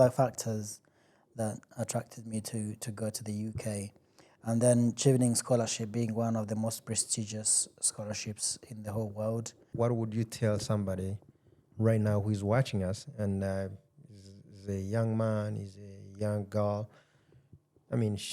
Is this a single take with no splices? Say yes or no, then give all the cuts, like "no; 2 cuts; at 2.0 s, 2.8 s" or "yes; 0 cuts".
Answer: no; 1 cut; at 9.6 s